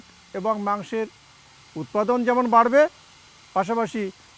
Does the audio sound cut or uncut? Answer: uncut